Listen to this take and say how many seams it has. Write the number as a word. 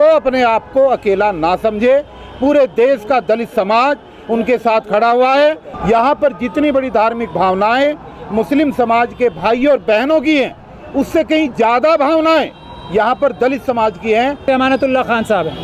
two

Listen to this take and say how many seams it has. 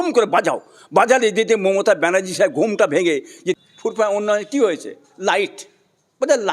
one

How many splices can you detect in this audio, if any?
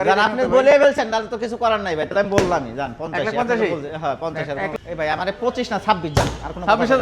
one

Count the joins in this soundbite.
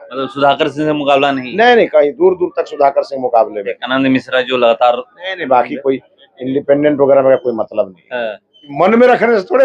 one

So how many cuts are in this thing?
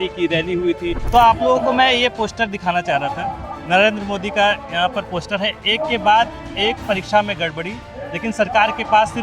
one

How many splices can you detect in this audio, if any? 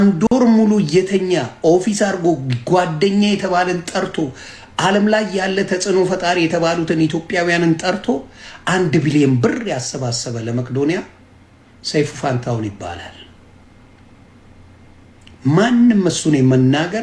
zero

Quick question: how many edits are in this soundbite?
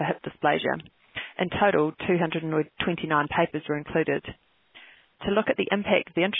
zero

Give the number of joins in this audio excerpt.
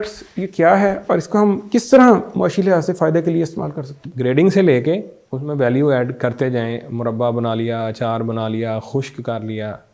one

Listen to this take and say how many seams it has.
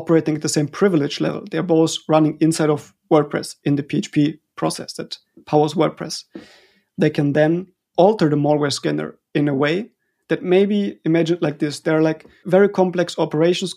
two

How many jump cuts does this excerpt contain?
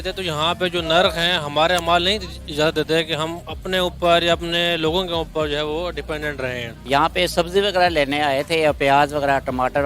one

